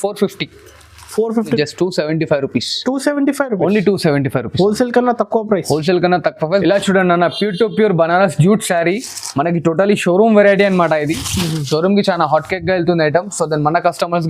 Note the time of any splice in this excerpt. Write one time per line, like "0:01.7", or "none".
0:01.5
0:06.4